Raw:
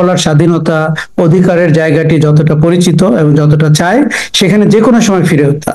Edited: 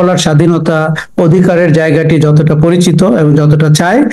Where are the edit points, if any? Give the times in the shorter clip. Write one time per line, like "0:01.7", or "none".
none